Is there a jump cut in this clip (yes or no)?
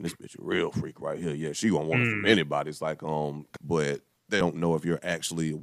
yes